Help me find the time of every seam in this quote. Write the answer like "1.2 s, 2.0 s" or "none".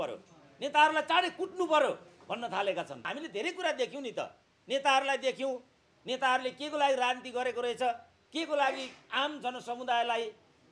3.1 s